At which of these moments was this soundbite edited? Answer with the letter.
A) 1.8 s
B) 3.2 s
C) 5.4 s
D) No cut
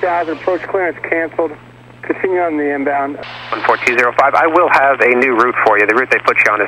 B